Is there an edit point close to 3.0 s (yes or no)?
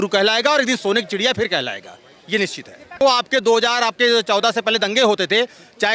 yes